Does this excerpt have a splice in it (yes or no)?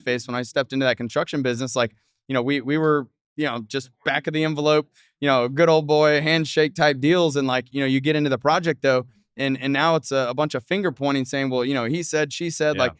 no